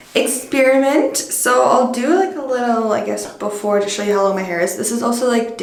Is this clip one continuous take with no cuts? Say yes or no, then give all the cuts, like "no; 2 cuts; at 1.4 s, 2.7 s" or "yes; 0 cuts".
yes; 0 cuts